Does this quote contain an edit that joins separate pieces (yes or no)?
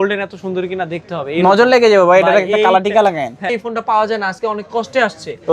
yes